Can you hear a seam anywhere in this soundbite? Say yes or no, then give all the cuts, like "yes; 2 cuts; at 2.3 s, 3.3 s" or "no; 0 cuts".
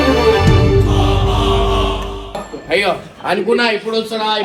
yes; 1 cut; at 2.4 s